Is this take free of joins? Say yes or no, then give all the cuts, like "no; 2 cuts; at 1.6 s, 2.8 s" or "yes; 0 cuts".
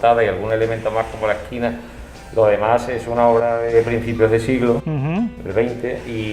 yes; 0 cuts